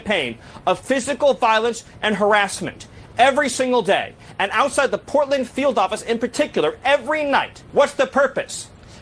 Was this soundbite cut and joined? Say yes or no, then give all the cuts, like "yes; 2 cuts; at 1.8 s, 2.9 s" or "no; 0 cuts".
yes; 1 cut; at 7.6 s